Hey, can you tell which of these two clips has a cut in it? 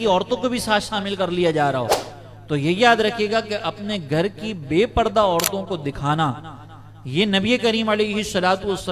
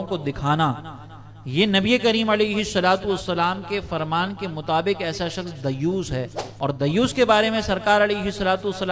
second; 1 cut; at 6.4 s

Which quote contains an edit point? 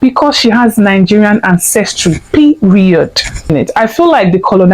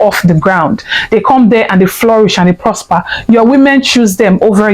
first; 1 cut; at 3.4 s

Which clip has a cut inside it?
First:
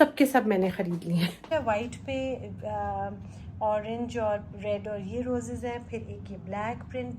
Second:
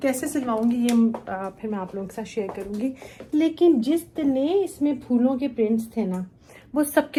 first; 1 cut; at 1.4 s

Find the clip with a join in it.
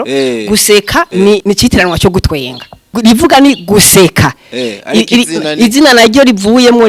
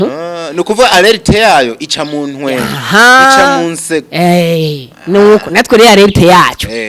first; 2 cuts; at 1.4 s, 3.0 s

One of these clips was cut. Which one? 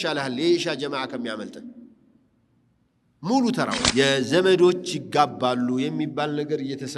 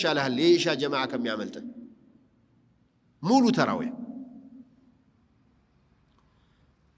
first; 1 cut; at 3.9 s

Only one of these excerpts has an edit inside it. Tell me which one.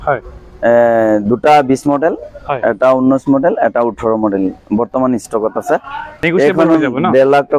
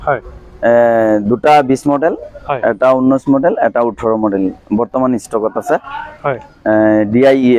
first; 1 cut; at 6.2 s

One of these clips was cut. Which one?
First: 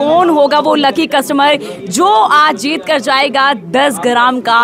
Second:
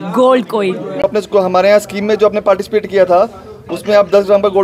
second; 1 cut; at 1.0 s

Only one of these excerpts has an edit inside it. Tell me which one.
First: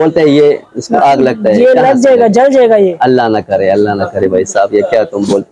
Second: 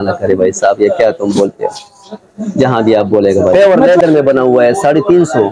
second; 1 cut; at 3.5 s

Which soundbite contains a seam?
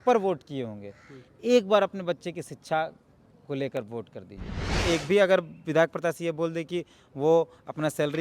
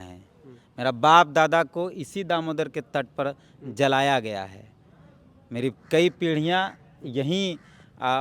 first; 1 cut; at 4.8 s

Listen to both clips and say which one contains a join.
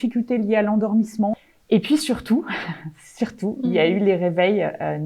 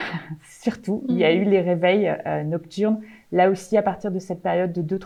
first; 1 cut; at 1.3 s

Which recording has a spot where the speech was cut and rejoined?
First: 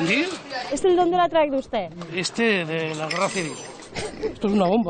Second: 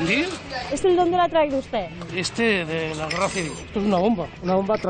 second; 1 cut; at 3.7 s

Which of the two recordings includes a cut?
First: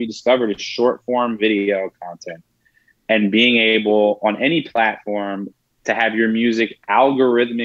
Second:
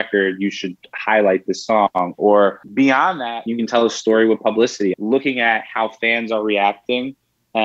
second; 2 cuts; at 3.1 s, 4.9 s

